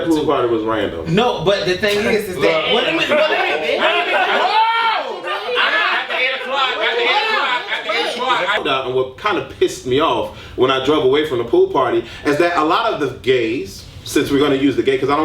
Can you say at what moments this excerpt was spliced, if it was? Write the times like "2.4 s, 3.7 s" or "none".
8.6 s

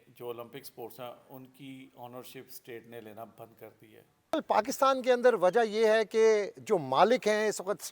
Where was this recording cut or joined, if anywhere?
4.3 s

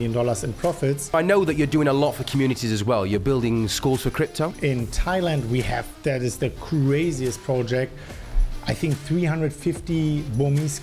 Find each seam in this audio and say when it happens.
1.1 s, 4.6 s

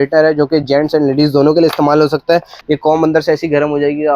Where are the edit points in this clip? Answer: 2.5 s

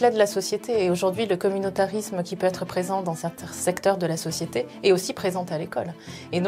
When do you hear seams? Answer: none

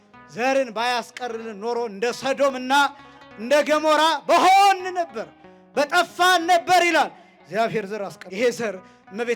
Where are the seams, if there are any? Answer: 8.2 s

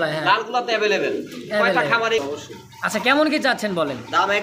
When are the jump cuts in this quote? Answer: 2.2 s

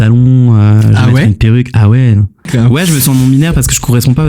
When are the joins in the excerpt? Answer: 2.5 s

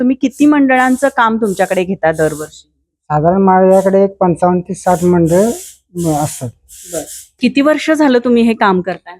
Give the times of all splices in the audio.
7.3 s

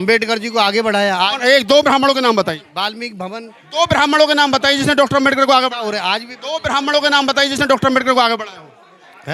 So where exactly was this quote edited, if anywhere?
none

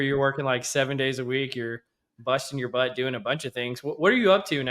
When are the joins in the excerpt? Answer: none

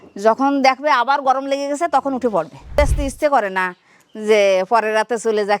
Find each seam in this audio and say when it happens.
2.8 s

